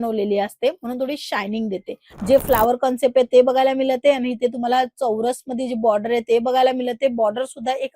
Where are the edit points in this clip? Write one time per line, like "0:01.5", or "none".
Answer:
0:02.0

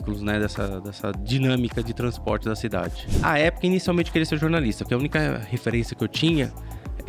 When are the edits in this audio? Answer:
0:03.2

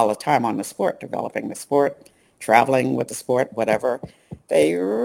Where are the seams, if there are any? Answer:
none

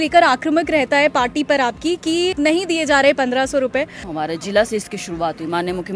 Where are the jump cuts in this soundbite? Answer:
0:02.3
0:04.0

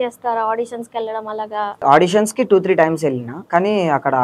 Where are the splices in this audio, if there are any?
0:01.8
0:03.3

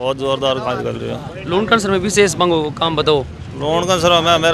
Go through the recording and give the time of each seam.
none

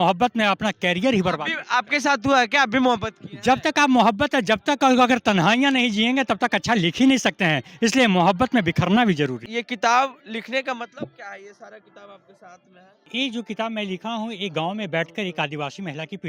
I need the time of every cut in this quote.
0:09.4
0:13.0

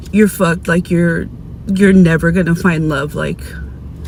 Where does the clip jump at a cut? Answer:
none

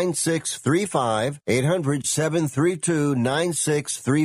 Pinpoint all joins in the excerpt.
0:01.4

